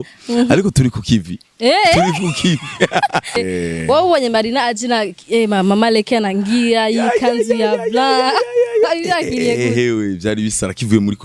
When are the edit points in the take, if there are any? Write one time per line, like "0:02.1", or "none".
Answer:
0:03.4

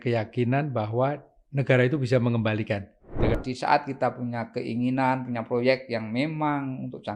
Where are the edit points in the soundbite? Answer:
0:03.3

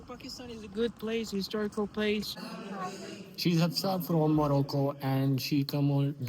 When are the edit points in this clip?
0:02.3

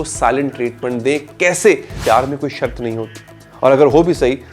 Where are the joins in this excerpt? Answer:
0:02.0

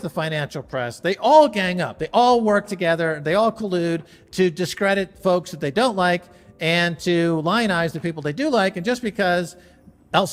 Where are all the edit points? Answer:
none

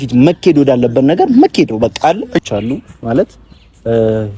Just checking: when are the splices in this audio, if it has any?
0:02.4

